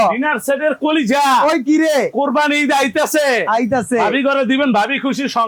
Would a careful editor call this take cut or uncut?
uncut